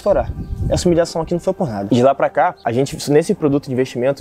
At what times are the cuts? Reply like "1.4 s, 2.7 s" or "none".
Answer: 1.8 s, 2.6 s